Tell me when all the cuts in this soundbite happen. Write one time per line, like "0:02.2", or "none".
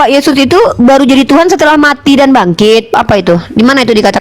0:02.9

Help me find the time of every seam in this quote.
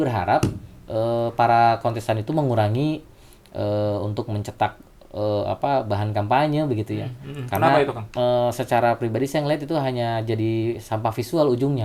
none

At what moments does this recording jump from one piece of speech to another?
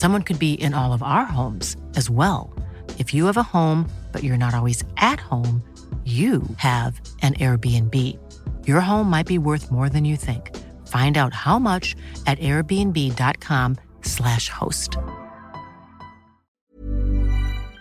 0:16.6

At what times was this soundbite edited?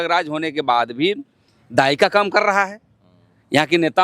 none

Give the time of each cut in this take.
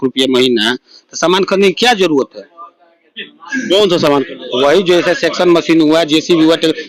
none

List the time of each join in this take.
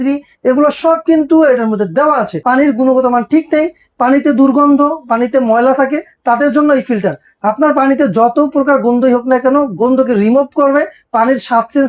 0:02.3

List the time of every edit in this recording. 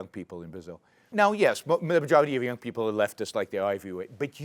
0:01.1

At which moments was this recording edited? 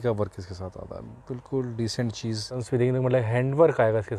0:02.6

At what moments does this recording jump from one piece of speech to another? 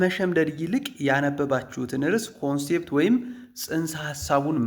none

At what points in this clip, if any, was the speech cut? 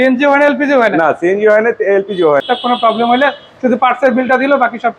0:02.4

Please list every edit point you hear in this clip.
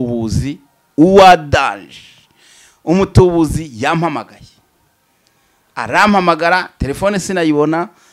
none

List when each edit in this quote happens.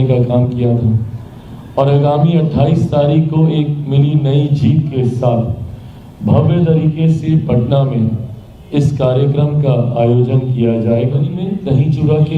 0:11.3

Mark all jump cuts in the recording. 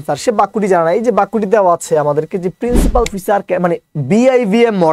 0:03.1

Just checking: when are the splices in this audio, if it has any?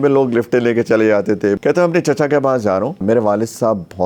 0:01.6
0:03.0

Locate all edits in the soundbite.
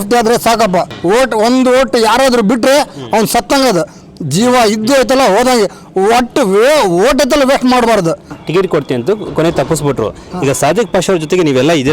0:00.9
0:08.3

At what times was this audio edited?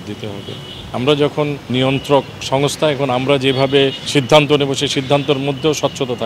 0:00.9
0:01.7
0:04.1

